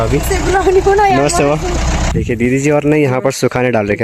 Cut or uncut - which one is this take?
cut